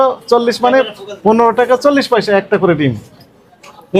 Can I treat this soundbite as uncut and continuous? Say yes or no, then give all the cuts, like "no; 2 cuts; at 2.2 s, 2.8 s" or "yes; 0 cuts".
yes; 0 cuts